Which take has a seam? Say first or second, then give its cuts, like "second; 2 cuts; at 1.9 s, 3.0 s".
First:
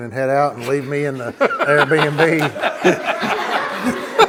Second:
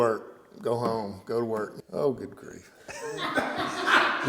second; 1 cut; at 1.7 s